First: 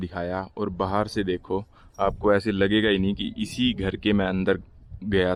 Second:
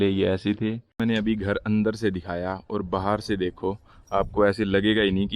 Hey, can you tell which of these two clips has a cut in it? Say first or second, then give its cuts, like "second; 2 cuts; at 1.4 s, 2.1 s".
second; 1 cut; at 1.0 s